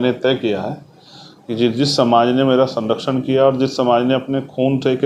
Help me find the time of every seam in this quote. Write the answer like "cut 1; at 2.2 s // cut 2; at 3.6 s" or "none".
none